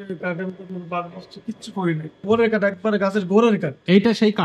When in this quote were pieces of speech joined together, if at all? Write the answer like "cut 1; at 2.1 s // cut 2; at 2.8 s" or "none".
cut 1; at 2.2 s